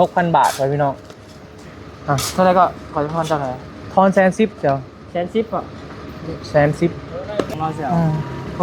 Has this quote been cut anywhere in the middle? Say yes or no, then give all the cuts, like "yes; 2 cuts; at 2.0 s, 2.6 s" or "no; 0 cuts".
yes; 1 cut; at 7.5 s